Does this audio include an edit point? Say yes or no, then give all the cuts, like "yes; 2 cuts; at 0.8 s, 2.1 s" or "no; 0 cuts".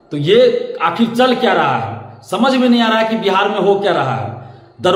no; 0 cuts